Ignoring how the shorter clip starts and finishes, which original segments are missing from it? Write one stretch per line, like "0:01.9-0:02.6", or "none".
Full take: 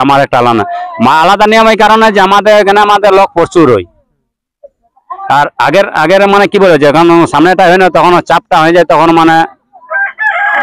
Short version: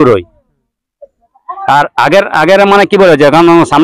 none